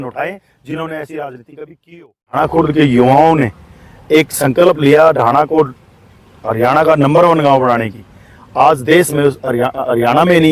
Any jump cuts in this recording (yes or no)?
yes